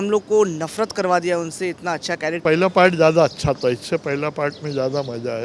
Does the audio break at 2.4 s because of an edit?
yes; 1 cut; at 2.4 s

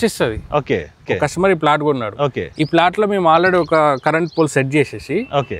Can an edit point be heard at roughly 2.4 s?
no; 1 cut; at 1.1 s

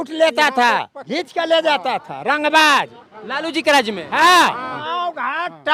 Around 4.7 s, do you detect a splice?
yes; 2 cuts; at 1.0 s, 4.7 s

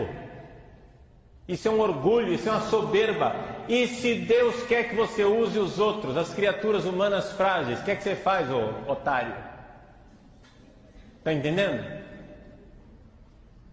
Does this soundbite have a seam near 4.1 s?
no; 1 cut; at 6.6 s

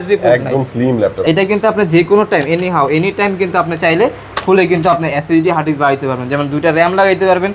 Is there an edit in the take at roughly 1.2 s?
yes; 1 cut; at 1.2 s

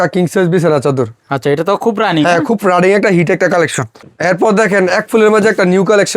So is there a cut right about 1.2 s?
no; 1 cut; at 4.0 s

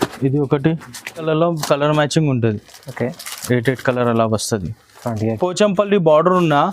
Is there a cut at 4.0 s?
no; 2 cuts; at 1.2 s, 5.4 s

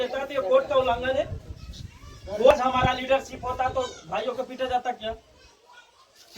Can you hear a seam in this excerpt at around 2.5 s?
yes; 1 cut; at 2.5 s

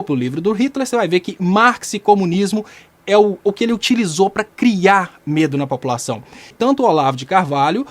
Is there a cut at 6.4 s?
yes; 1 cut; at 6.4 s

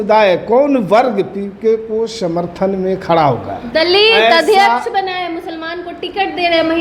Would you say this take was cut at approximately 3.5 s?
no; 0 cuts

